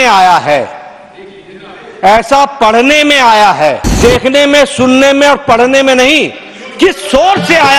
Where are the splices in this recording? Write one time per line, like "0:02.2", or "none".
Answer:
0:04.0